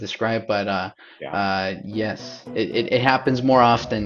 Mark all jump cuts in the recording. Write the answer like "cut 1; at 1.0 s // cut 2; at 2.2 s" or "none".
none